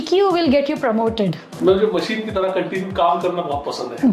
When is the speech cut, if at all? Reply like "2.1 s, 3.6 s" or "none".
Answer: 1.4 s